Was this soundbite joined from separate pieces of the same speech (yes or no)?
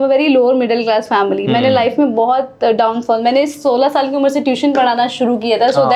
no